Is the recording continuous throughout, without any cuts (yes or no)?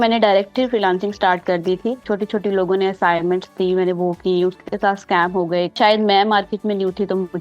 no